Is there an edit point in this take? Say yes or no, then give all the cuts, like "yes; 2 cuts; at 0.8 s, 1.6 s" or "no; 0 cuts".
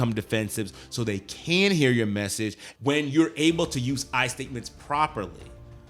yes; 1 cut; at 2.6 s